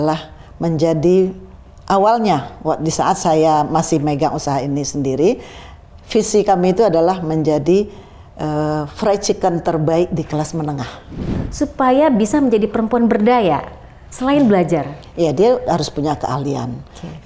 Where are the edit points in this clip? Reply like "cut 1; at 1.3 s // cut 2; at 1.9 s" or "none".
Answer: cut 1; at 11.4 s